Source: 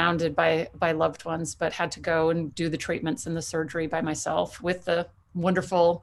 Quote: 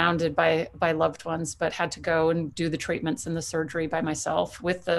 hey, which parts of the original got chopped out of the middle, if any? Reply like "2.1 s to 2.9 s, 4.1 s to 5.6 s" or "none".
none